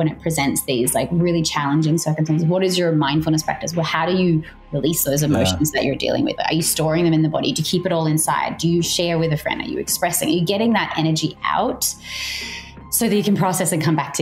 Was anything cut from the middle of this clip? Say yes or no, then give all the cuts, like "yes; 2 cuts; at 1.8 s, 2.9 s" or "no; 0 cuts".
no; 0 cuts